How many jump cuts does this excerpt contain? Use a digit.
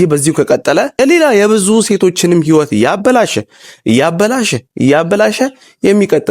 1